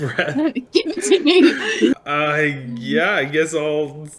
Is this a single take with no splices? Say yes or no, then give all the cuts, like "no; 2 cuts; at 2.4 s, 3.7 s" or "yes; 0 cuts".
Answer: no; 1 cut; at 1.9 s